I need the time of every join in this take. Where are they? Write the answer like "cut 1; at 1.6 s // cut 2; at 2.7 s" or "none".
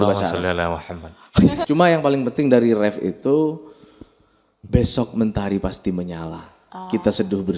cut 1; at 1.6 s